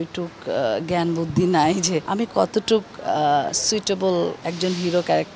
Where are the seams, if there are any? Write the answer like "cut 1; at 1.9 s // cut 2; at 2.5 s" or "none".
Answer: cut 1; at 2.1 s // cut 2; at 4.4 s